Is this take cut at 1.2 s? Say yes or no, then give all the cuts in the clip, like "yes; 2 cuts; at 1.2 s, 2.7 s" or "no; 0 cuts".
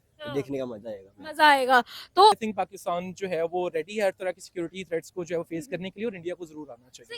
no; 1 cut; at 2.4 s